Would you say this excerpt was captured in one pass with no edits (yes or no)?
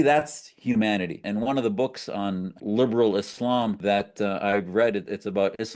no